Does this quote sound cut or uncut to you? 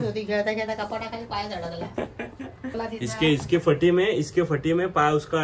cut